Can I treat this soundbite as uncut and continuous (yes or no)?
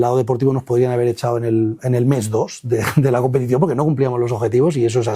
yes